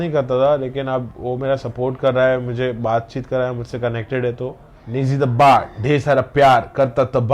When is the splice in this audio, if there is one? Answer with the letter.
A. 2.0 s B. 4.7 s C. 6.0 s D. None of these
B